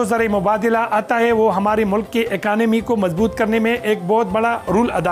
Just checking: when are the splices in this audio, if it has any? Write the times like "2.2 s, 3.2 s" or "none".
none